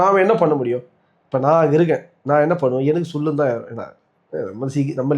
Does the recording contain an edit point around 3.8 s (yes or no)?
no